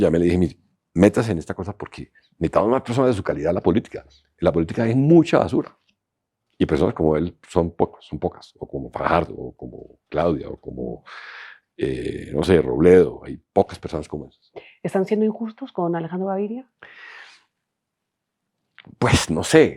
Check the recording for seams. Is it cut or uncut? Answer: uncut